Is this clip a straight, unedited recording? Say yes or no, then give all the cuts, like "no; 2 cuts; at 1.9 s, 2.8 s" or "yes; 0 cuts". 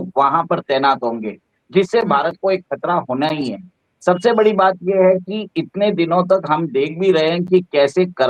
yes; 0 cuts